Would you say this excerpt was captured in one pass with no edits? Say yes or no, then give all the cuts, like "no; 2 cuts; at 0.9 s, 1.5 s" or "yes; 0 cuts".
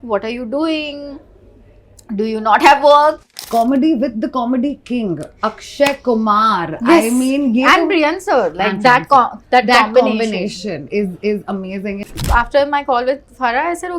no; 2 cuts; at 3.2 s, 12.1 s